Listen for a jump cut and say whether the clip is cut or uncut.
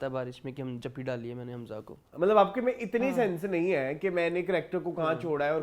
cut